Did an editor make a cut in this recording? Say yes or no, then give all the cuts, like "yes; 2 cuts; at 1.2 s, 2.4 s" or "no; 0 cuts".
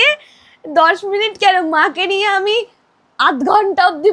no; 0 cuts